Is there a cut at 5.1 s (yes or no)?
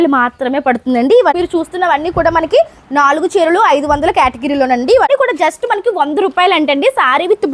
yes